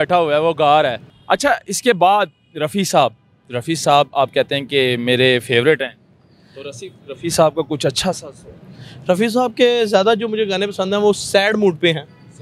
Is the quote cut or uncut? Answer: uncut